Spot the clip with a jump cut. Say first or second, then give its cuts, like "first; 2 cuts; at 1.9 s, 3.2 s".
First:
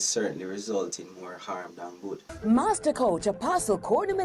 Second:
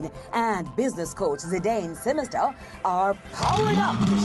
first; 1 cut; at 2.3 s